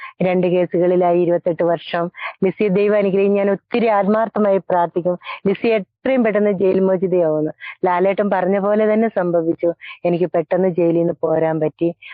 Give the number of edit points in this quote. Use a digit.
0